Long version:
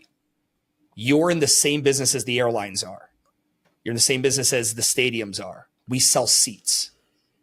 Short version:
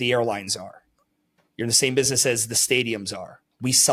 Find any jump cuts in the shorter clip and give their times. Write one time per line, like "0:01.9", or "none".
none